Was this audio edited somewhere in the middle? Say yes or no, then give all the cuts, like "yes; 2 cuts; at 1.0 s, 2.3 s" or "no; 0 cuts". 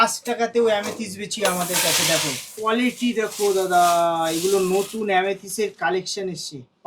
yes; 1 cut; at 2.5 s